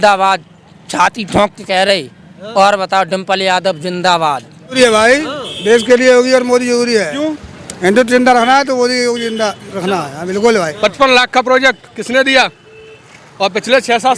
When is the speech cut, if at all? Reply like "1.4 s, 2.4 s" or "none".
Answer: 4.8 s, 10.7 s